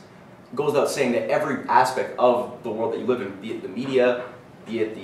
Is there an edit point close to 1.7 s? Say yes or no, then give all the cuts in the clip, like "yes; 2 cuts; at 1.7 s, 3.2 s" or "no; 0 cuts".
no; 0 cuts